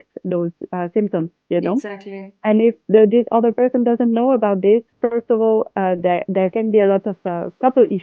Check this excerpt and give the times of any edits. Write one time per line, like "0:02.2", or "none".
none